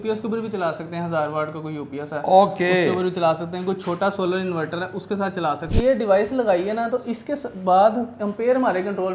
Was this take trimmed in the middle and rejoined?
yes; 1 cut; at 5.7 s

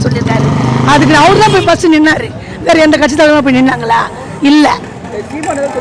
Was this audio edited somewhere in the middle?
no; 0 cuts

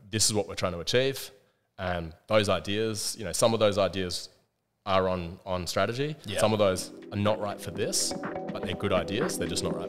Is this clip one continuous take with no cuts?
yes; 0 cuts

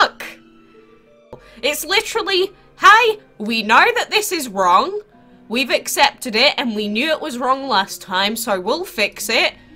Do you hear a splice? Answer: yes; 1 cut; at 1.5 s

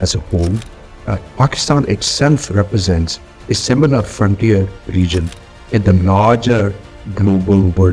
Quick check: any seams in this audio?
no; 0 cuts

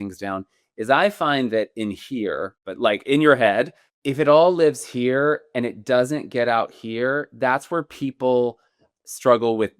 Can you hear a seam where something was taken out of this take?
yes; 2 cuts; at 2.6 s, 3.8 s

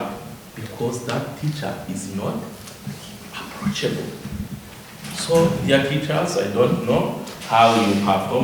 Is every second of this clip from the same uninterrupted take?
yes; 0 cuts

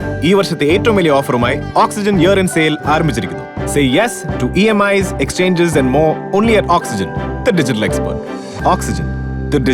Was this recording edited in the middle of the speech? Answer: no; 0 cuts

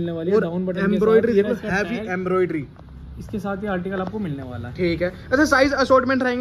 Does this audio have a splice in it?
no; 0 cuts

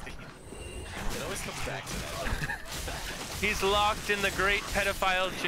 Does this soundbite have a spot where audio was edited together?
no; 0 cuts

